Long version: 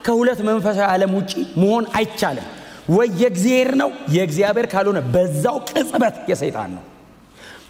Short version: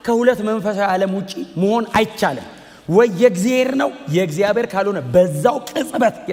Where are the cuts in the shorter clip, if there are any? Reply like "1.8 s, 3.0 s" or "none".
none